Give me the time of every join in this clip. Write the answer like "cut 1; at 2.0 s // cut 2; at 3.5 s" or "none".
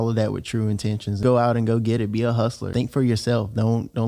cut 1; at 1.2 s // cut 2; at 2.7 s